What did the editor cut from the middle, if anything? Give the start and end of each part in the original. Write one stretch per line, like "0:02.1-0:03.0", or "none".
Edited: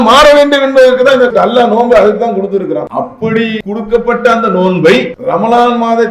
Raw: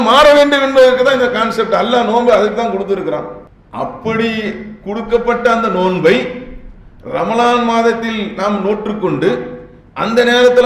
0:01.3-0:01.7
0:03.2-0:03.7
0:04.4-0:04.8
0:06.4-0:07.0